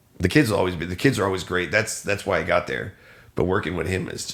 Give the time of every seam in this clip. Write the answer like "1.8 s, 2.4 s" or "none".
none